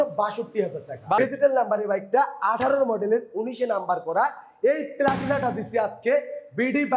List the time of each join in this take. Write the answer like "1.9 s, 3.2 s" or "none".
1.2 s